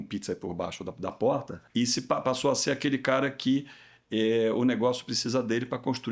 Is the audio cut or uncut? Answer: cut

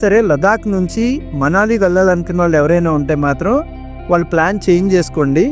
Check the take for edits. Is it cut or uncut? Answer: uncut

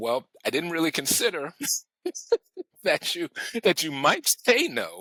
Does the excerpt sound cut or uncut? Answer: uncut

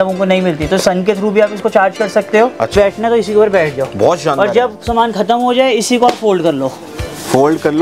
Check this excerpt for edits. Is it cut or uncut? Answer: cut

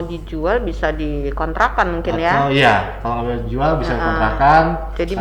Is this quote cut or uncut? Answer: uncut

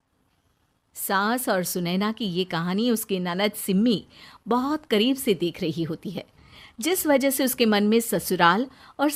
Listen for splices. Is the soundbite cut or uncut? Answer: uncut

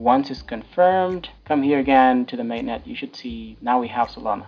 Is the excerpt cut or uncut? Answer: cut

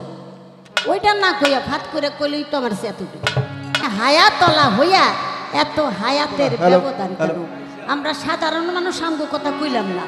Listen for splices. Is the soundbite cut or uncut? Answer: cut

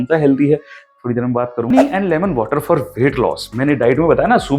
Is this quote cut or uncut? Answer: cut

